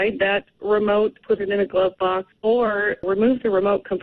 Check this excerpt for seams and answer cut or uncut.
cut